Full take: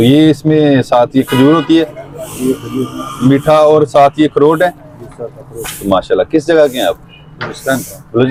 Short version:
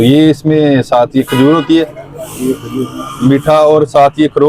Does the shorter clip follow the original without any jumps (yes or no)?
yes